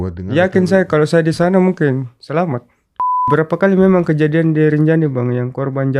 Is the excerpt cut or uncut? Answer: cut